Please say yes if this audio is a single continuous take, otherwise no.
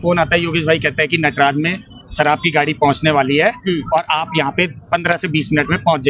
yes